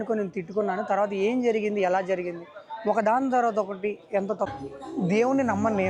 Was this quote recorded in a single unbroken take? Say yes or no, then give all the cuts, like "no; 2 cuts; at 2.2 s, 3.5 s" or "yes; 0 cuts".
no; 1 cut; at 4.5 s